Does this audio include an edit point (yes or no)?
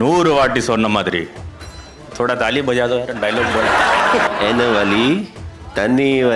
yes